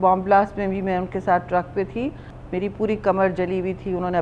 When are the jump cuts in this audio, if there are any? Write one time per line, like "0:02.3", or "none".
0:02.3